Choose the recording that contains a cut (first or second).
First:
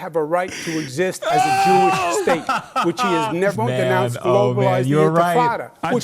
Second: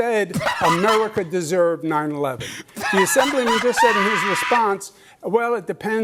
first